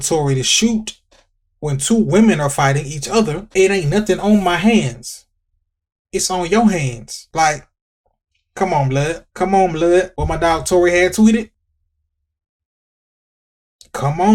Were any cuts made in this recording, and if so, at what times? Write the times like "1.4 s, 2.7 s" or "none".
none